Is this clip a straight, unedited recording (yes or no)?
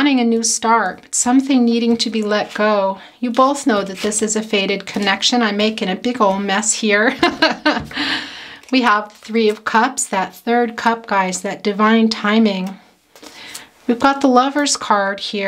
yes